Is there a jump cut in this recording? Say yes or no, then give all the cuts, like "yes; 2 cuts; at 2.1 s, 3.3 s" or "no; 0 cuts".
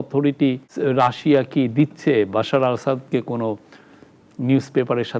no; 0 cuts